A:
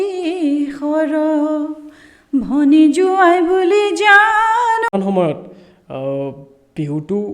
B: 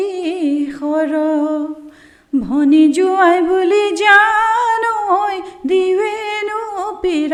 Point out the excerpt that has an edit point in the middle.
A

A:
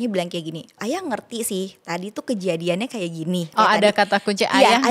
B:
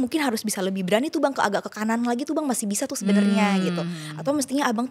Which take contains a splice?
A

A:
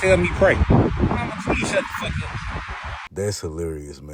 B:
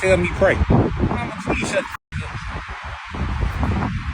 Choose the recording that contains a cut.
B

